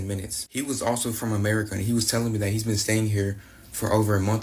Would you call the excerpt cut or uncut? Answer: uncut